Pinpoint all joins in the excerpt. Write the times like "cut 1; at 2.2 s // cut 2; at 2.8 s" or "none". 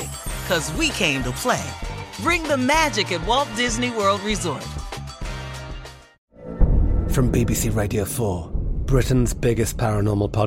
cut 1; at 6.1 s